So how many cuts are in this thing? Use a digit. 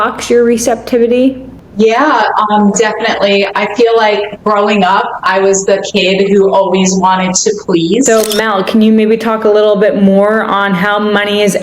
1